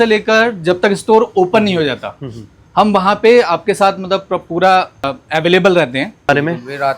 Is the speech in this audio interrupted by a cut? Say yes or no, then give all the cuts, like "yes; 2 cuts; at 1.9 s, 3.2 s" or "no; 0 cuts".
yes; 2 cuts; at 5.2 s, 6.3 s